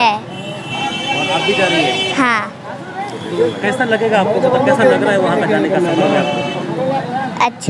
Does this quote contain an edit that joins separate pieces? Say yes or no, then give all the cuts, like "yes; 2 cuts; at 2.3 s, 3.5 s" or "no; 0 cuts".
no; 0 cuts